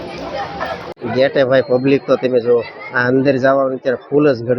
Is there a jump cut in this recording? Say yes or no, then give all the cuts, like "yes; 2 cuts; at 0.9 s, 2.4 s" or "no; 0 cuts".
yes; 1 cut; at 0.9 s